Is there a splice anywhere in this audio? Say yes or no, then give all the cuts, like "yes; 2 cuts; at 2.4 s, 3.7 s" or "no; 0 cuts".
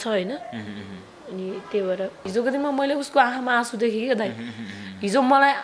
yes; 1 cut; at 2.3 s